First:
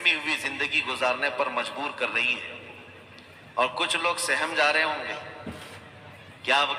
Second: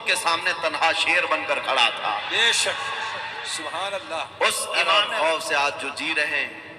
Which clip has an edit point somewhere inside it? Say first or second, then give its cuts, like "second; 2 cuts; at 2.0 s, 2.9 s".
second; 1 cut; at 4.8 s